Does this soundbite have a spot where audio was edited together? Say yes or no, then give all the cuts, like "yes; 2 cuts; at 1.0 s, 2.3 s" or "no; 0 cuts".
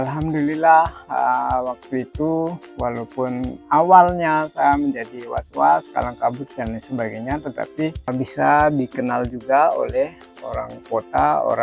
yes; 1 cut; at 8.0 s